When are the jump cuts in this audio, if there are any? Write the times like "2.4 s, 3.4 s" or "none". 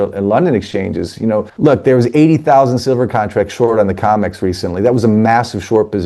1.5 s